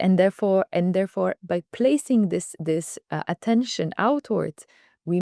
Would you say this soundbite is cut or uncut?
uncut